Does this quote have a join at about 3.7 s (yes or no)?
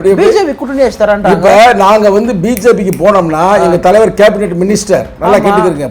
no